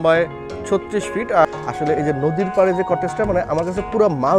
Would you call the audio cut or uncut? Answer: cut